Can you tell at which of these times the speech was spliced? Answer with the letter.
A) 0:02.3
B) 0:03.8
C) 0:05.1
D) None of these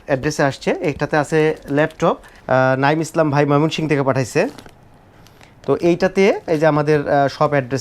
A